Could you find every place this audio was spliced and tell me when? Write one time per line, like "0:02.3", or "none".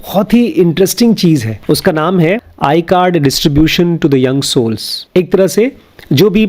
0:01.5
0:02.5
0:04.9